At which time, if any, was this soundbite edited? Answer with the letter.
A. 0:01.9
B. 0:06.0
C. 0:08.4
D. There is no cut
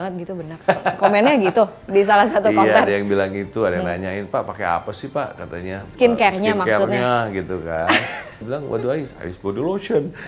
C